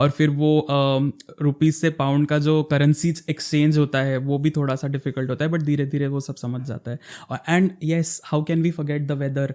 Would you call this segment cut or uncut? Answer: uncut